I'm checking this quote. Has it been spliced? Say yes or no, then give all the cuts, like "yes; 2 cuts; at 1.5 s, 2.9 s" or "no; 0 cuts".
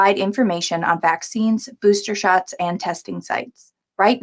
no; 0 cuts